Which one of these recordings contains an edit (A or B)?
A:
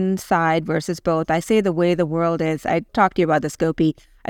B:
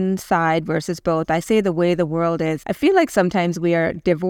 B